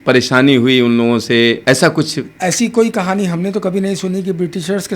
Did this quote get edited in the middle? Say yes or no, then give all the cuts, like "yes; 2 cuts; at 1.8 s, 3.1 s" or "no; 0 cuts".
yes; 1 cut; at 1.6 s